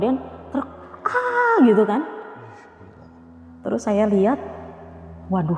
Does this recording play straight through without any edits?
yes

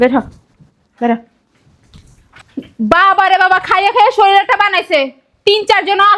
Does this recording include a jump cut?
no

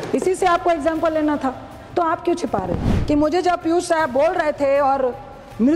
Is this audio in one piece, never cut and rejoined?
no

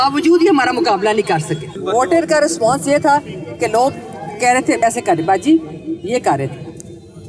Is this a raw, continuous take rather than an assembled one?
yes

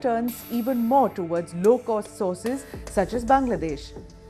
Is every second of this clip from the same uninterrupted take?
no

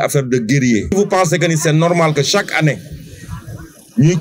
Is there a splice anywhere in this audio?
yes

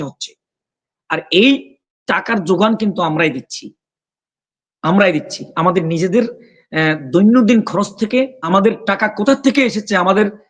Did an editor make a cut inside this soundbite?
yes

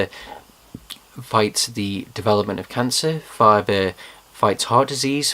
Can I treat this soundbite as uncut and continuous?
no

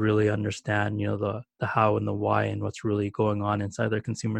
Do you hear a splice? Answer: no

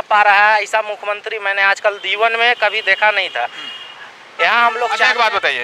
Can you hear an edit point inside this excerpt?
no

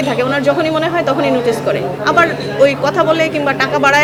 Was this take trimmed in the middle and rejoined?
no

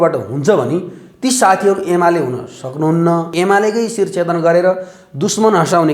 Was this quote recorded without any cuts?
no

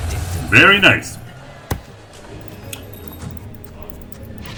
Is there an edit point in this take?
no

